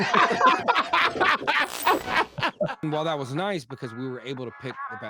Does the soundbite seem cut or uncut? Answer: cut